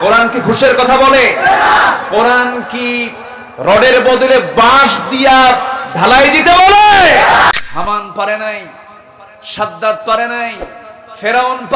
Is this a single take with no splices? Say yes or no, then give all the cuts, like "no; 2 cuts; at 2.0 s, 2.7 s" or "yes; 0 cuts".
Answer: no; 1 cut; at 7.5 s